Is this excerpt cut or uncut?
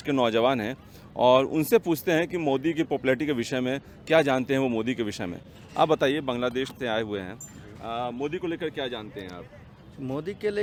uncut